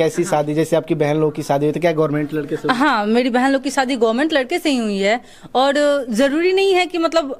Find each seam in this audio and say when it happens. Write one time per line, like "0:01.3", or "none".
none